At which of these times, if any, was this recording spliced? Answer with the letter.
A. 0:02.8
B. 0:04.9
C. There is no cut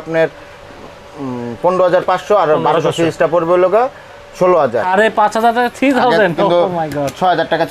B